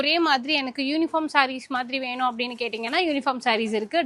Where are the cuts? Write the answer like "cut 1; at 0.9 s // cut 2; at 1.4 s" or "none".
none